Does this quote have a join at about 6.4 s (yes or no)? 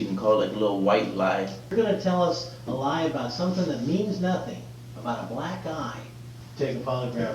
yes